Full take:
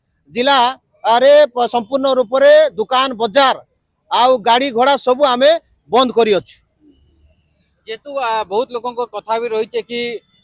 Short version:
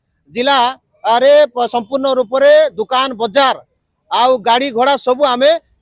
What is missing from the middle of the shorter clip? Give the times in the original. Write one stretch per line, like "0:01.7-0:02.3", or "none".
none

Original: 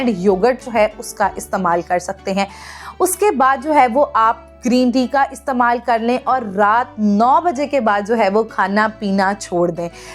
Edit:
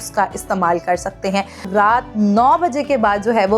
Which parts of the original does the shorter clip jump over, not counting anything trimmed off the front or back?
0:02.7-0:06.5

